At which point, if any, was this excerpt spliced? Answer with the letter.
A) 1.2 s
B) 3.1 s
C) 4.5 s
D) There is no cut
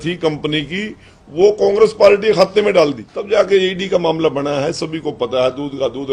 B